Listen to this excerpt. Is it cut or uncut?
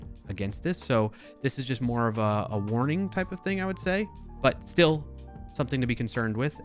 cut